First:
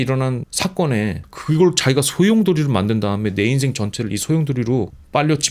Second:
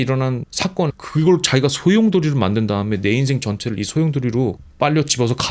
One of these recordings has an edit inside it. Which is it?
second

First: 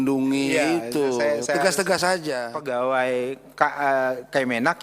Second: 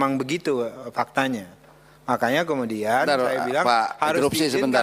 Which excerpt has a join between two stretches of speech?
first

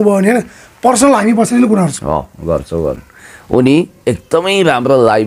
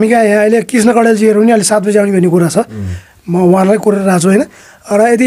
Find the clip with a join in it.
first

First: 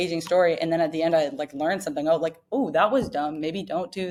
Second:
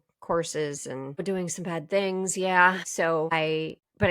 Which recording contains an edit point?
second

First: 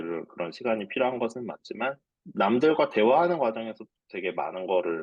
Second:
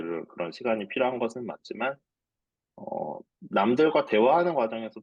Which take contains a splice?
first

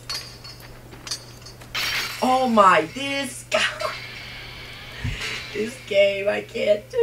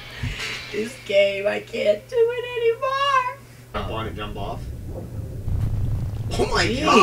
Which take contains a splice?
second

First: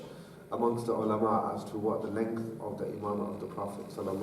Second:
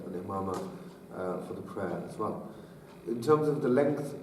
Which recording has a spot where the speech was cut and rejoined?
first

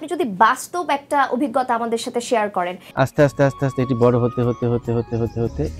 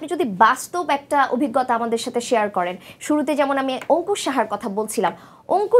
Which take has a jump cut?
first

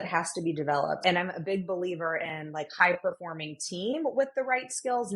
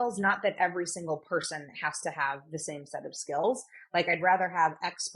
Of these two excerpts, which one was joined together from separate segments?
first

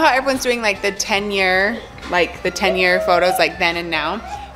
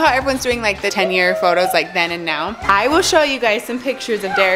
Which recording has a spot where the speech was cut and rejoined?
second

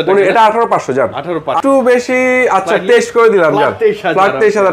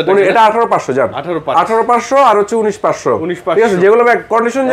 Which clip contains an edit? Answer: first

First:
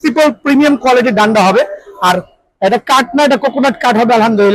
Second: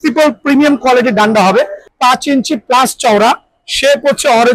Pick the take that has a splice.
second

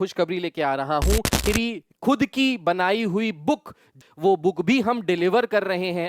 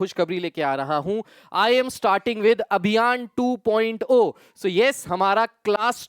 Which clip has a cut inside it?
first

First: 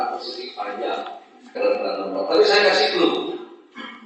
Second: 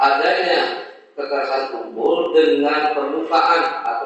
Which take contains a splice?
first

